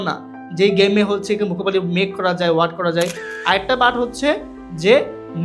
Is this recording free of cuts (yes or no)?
no